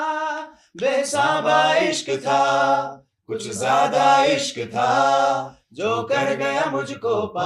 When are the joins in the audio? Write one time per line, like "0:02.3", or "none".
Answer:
none